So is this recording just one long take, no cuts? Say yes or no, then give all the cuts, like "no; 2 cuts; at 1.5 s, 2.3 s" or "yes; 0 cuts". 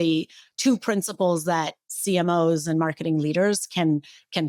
yes; 0 cuts